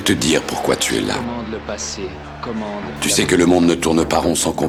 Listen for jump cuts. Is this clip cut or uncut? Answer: uncut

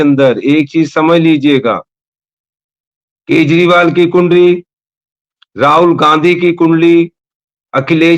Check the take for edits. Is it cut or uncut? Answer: uncut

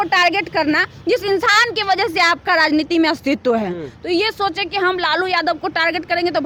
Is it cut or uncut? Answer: uncut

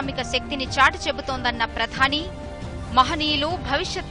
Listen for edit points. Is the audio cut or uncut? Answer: uncut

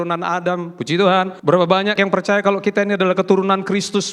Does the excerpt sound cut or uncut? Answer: cut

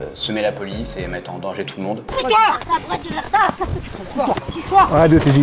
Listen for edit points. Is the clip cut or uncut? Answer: cut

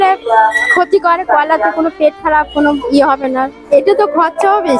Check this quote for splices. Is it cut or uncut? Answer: cut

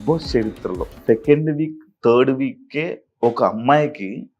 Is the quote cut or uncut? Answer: cut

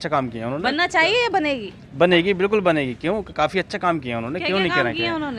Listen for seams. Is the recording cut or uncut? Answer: uncut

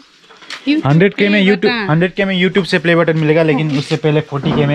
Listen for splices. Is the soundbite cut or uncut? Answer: uncut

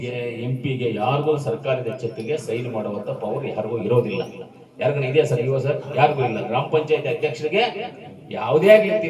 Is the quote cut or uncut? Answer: uncut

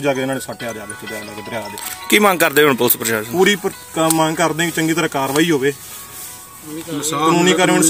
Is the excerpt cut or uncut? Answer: uncut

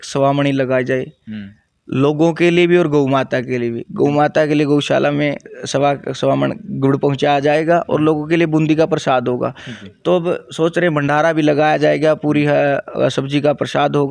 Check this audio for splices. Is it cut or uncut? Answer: uncut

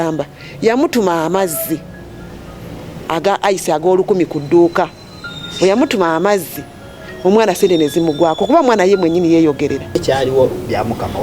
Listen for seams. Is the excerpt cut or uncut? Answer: cut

